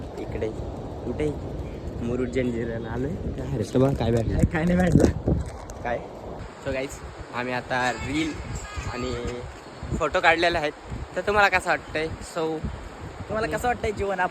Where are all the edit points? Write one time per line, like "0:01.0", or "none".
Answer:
0:06.4